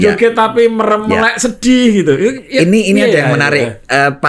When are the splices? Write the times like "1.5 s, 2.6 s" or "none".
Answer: none